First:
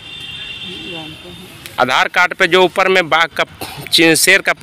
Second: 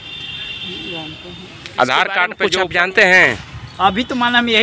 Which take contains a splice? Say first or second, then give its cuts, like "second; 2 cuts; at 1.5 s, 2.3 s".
second; 1 cut; at 2.4 s